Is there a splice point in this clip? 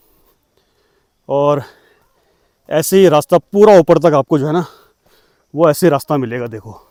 no; 0 cuts

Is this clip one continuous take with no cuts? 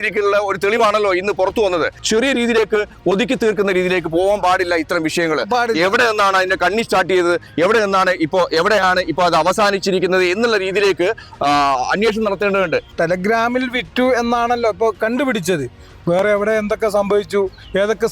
no; 2 cuts; at 2.0 s, 12.9 s

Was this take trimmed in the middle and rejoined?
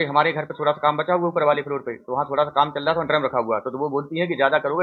no; 0 cuts

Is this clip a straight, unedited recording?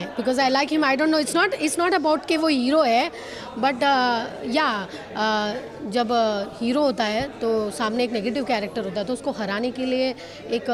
yes; 0 cuts

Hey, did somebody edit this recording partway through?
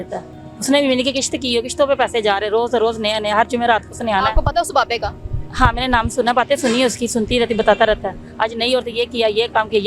no; 0 cuts

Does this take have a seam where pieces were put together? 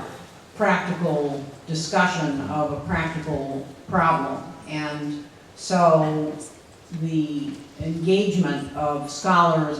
no; 0 cuts

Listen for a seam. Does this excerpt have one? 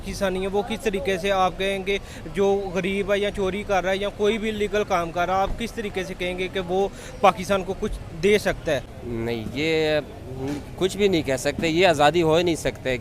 yes; 1 cut; at 9.0 s

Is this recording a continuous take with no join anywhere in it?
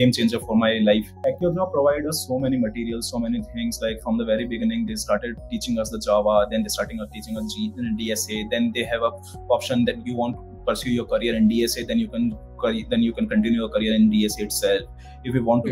no; 1 cut; at 1.1 s

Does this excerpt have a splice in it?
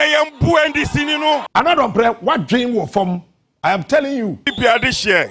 yes; 2 cuts; at 1.5 s, 4.5 s

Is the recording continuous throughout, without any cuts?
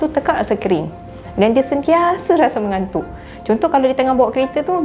yes; 0 cuts

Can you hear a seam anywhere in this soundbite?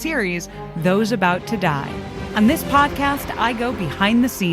yes; 1 cut; at 2.2 s

